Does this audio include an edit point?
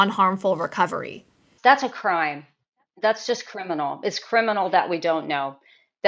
no; 0 cuts

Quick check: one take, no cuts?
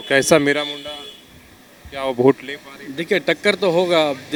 yes; 0 cuts

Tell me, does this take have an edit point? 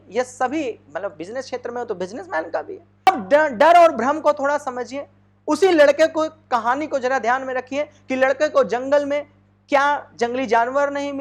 yes; 1 cut; at 3.1 s

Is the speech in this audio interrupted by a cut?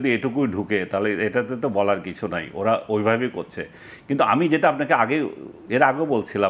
no; 0 cuts

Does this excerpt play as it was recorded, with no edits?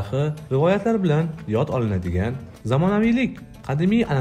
yes; 0 cuts

